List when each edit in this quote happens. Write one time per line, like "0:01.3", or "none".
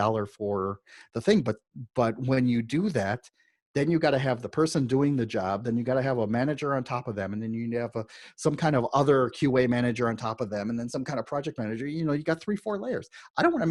none